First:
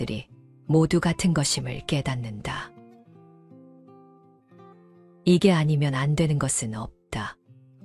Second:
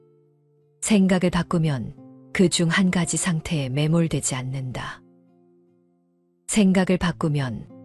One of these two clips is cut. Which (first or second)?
second